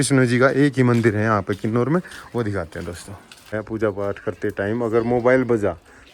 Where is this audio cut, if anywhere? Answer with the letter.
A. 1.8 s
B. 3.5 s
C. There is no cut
B